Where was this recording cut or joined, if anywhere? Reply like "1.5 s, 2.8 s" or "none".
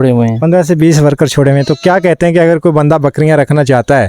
none